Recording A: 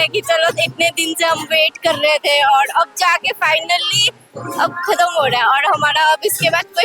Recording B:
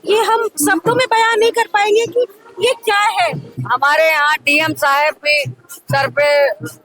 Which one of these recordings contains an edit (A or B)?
B